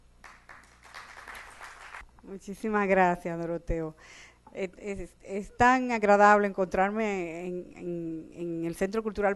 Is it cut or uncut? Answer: uncut